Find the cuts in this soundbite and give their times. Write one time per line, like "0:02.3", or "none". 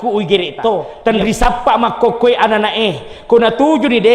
0:00.9